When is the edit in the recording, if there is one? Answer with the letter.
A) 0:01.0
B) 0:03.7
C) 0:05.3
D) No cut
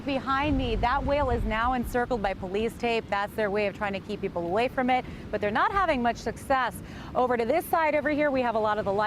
A